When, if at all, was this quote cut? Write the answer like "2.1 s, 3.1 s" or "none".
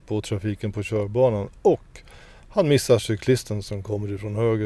none